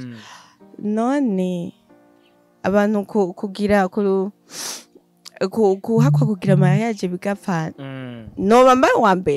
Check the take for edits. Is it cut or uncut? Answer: uncut